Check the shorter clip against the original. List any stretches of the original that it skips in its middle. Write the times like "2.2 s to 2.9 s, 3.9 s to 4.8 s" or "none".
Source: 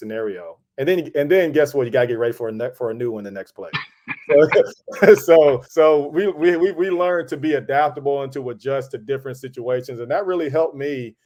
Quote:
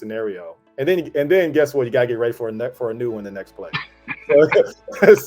none